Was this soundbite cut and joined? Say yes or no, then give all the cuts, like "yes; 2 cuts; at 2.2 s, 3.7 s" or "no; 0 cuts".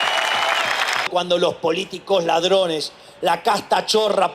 yes; 1 cut; at 1.1 s